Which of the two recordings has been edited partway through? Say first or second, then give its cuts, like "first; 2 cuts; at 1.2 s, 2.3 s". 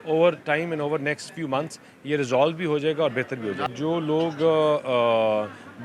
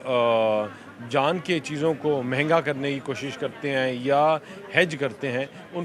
first; 1 cut; at 3.7 s